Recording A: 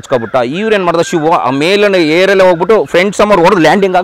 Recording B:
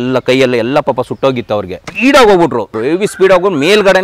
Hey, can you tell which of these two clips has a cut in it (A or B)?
B